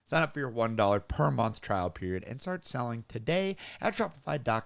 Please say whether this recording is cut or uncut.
uncut